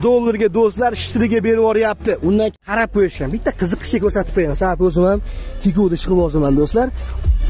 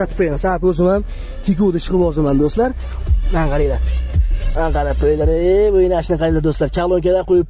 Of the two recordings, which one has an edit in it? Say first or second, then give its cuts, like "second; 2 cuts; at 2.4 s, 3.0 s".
first; 1 cut; at 2.6 s